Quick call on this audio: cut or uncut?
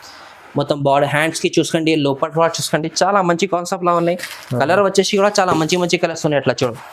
uncut